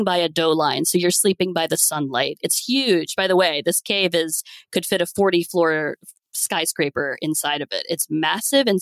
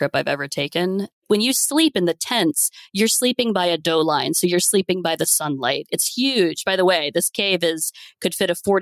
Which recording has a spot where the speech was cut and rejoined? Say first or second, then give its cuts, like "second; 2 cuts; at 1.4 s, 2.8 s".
second; 1 cut; at 1.2 s